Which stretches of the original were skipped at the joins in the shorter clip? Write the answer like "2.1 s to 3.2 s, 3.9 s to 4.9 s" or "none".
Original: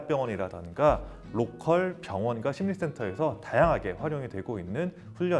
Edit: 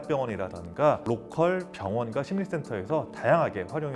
1.0 s to 1.3 s